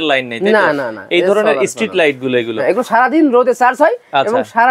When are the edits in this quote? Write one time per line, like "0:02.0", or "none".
none